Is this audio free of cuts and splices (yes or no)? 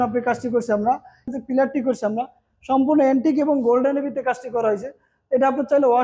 no